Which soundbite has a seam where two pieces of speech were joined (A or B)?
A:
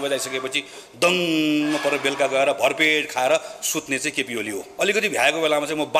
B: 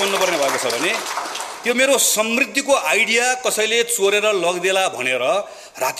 A